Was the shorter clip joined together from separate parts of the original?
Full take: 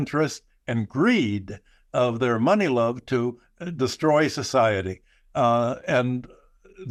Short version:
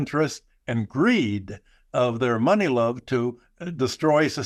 no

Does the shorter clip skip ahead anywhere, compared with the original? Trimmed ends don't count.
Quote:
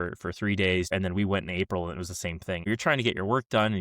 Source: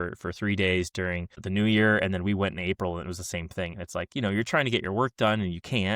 yes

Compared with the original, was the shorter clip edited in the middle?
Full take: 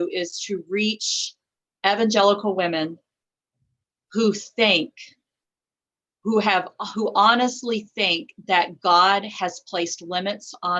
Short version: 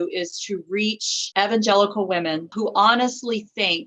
yes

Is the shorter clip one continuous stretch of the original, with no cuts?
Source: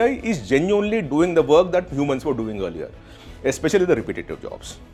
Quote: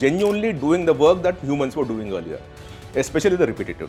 yes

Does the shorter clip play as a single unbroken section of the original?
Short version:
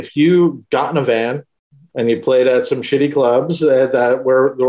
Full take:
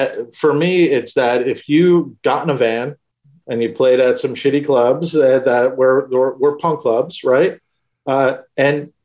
yes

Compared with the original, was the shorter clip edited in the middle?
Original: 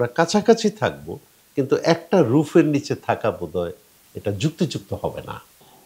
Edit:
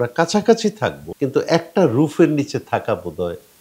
yes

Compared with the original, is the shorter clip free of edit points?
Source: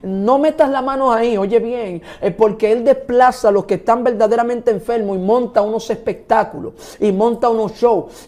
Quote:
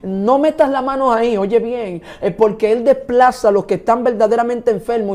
yes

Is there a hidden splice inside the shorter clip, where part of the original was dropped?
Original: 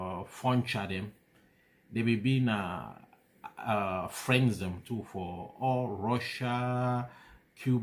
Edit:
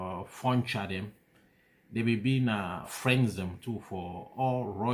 yes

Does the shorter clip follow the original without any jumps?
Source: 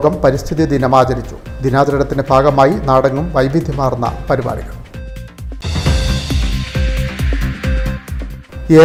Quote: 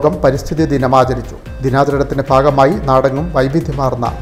yes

